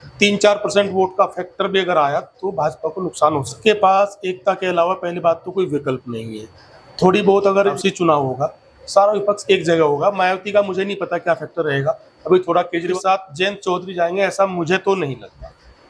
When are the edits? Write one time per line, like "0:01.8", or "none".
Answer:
0:03.5
0:07.8
0:12.9